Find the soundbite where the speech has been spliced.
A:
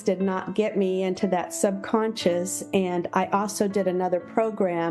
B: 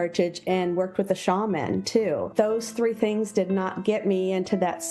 B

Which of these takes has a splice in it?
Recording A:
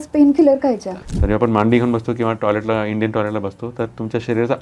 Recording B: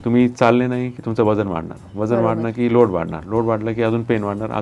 A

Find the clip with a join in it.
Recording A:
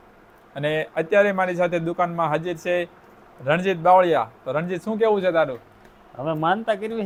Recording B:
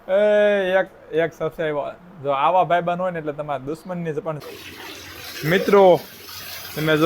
B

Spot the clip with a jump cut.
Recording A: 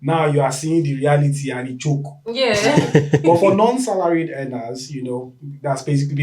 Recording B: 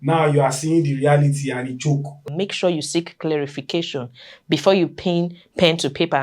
B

